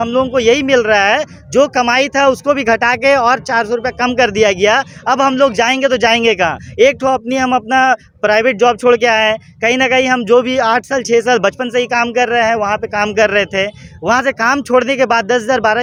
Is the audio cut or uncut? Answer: uncut